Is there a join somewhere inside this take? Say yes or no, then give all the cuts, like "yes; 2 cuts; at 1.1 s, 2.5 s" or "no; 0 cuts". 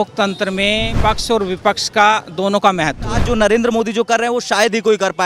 yes; 2 cuts; at 0.9 s, 3.2 s